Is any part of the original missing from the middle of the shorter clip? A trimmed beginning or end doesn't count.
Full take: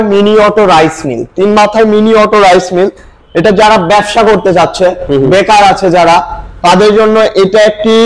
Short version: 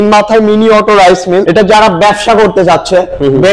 yes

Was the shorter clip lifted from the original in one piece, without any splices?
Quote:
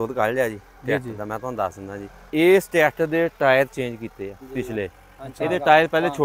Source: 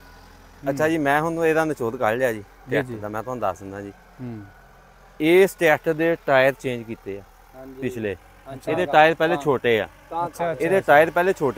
no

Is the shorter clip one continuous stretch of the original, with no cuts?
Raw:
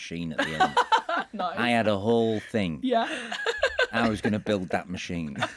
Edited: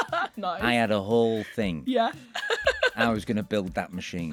yes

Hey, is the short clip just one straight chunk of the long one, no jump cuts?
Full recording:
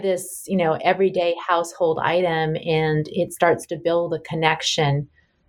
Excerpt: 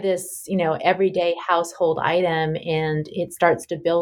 yes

